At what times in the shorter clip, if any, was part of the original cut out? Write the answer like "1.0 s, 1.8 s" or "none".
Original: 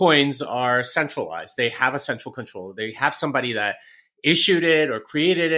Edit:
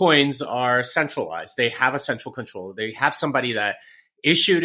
none